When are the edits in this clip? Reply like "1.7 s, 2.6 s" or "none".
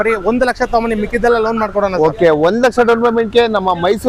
none

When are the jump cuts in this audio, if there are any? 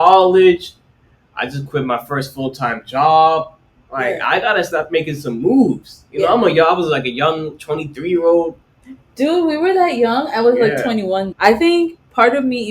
4.7 s, 11.3 s

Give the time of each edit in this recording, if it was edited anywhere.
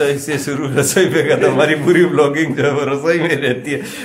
none

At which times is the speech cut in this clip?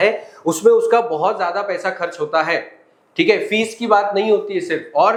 none

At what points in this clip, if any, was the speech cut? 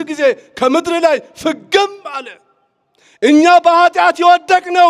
none

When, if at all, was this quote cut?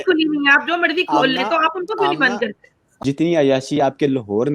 2.8 s

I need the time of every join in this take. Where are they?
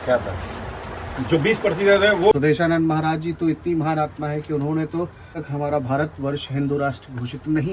2.3 s, 5.4 s

